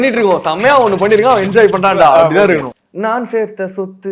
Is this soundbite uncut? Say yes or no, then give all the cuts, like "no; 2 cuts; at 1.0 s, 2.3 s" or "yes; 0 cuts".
yes; 0 cuts